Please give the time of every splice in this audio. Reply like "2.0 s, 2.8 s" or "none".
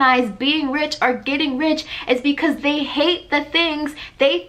none

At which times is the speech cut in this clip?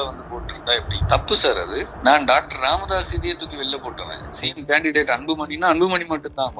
1.9 s

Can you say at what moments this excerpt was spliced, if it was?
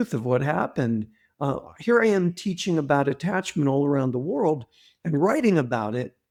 none

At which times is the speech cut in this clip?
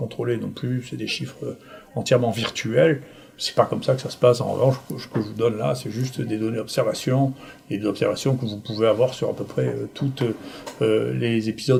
none

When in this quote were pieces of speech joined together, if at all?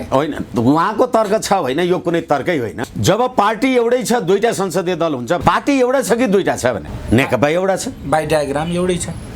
2.8 s, 5.4 s, 6.9 s

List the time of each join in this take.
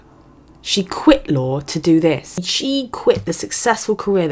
2.4 s

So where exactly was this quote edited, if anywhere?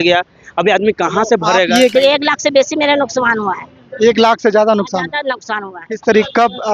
1.9 s

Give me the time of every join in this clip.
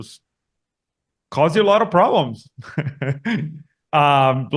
none

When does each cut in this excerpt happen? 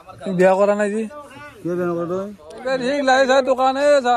2.5 s

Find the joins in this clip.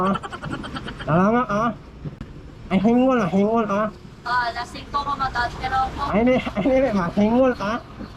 none

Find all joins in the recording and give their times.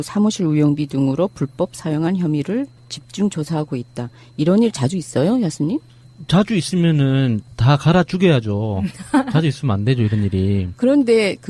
10.3 s

